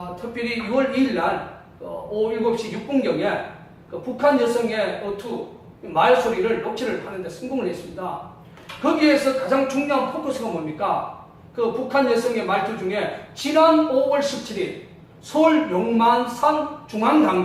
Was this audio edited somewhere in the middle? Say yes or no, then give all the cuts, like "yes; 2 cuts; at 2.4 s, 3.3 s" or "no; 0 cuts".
no; 0 cuts